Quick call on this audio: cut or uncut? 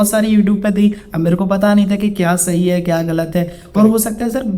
uncut